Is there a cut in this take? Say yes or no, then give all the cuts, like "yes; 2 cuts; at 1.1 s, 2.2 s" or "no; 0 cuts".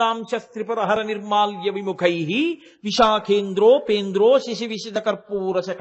no; 0 cuts